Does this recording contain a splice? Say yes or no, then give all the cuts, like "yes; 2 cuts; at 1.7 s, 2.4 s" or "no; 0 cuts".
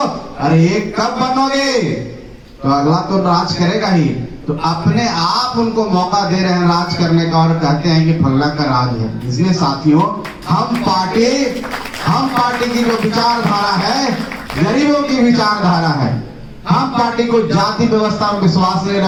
no; 0 cuts